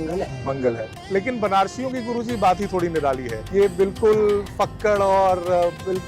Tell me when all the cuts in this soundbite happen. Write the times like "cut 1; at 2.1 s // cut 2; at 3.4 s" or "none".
cut 1; at 0.9 s // cut 2; at 3.3 s